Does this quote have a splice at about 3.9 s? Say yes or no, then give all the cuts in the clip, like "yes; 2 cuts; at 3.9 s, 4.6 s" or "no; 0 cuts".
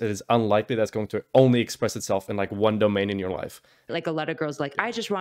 yes; 1 cut; at 3.9 s